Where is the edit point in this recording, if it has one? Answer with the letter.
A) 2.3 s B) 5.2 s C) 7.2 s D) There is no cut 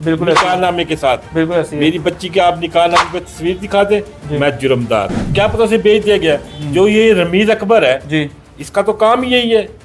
B